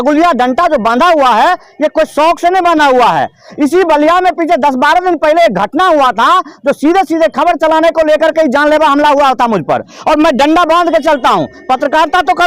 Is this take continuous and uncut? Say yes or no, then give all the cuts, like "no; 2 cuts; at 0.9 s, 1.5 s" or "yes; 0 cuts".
yes; 0 cuts